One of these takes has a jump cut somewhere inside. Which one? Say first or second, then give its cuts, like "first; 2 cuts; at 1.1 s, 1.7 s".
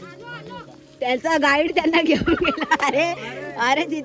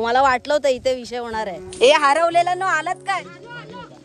second; 1 cut; at 1.6 s